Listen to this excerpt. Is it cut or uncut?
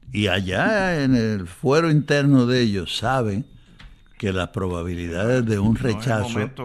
uncut